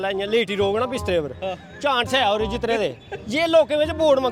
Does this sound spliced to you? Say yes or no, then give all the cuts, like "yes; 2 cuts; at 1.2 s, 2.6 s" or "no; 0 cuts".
no; 0 cuts